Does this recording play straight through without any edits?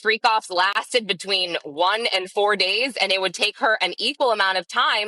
yes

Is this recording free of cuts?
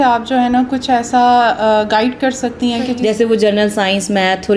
no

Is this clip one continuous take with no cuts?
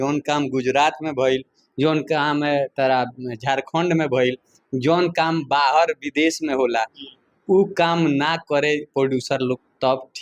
yes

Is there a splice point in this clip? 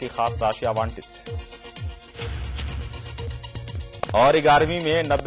yes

